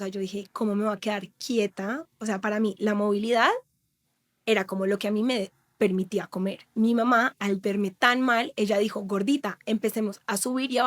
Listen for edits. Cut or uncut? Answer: cut